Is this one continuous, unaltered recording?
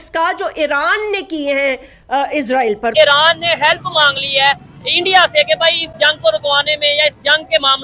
no; 1 cut; at 2.9 s

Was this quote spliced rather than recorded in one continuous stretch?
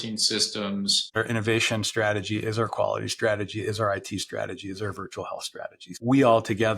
yes; 2 cuts; at 1.2 s, 5.8 s

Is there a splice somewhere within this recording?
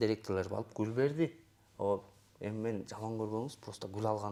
no; 0 cuts

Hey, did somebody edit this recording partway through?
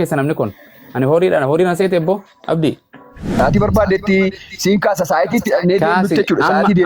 yes; 1 cut; at 3.4 s

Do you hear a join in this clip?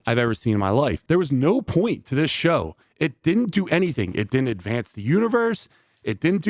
yes; 1 cut; at 1.0 s

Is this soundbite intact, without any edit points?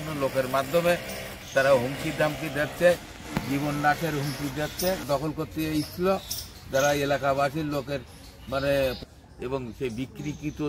no; 2 cuts; at 5.1 s, 9.1 s

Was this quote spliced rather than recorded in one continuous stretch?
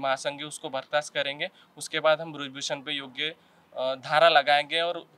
no; 0 cuts

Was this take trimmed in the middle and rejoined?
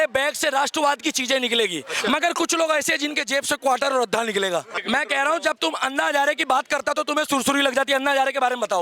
yes; 1 cut; at 4.8 s

